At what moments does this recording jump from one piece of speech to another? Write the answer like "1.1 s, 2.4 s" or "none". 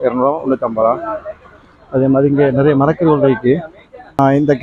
none